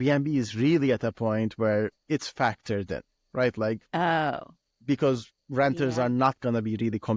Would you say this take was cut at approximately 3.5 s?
no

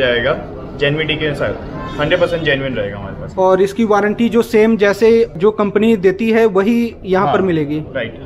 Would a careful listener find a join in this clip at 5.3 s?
yes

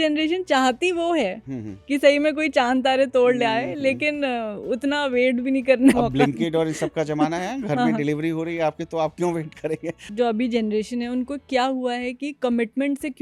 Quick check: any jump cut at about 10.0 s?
yes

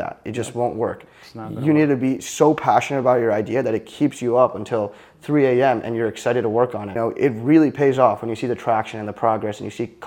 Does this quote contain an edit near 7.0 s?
yes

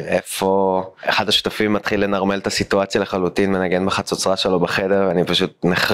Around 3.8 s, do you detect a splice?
no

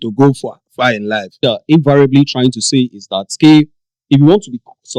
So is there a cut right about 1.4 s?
yes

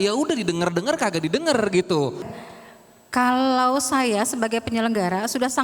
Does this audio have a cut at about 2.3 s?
yes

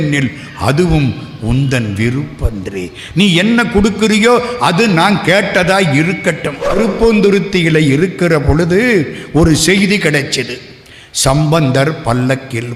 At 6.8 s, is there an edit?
yes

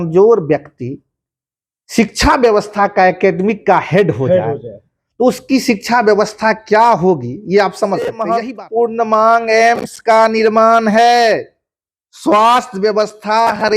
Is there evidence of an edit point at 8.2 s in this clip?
yes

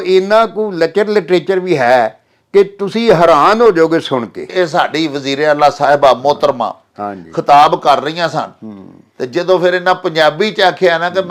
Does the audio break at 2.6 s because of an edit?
no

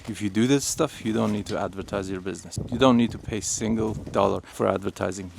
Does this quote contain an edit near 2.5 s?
yes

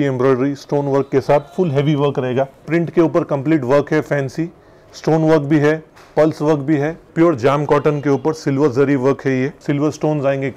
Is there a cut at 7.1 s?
yes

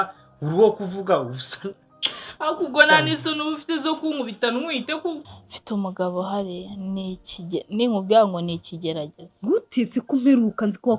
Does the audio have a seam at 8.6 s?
no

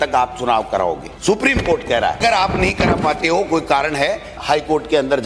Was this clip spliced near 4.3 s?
yes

